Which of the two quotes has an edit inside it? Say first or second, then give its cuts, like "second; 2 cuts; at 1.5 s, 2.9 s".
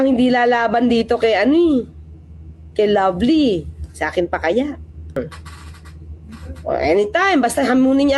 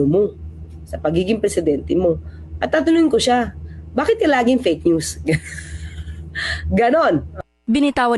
first; 1 cut; at 5.2 s